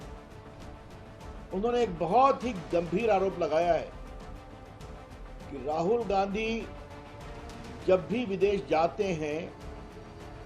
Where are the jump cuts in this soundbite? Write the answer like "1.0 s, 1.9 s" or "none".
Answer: 4.3 s, 5.5 s